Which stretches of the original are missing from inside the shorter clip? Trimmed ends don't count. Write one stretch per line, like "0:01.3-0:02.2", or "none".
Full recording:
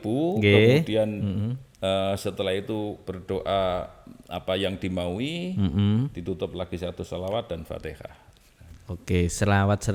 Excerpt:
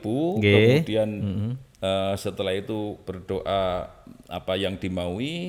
none

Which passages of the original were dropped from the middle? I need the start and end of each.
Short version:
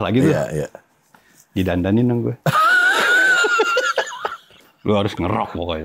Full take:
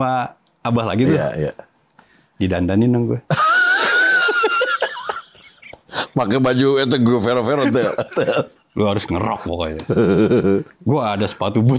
0:05.5-0:08.6

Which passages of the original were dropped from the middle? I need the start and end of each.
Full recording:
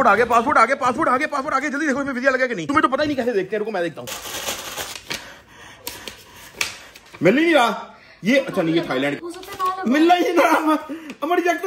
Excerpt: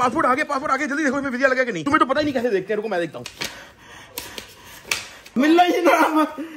0:04.1-0:04.9
0:07.0-0:09.8

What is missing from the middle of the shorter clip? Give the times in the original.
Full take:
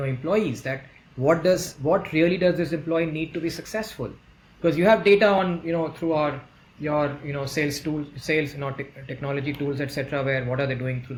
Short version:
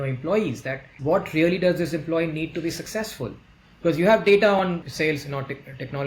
0:00.9-0:01.7
0:05.6-0:08.1

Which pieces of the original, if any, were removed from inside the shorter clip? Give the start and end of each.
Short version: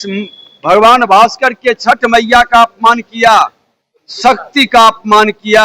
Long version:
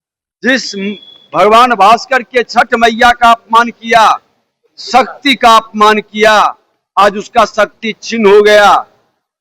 none

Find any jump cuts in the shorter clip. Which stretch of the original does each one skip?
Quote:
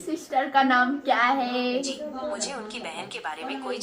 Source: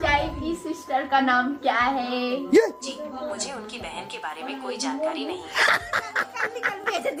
0:02.4-0:02.8

